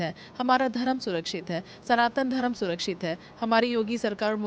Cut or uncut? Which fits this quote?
uncut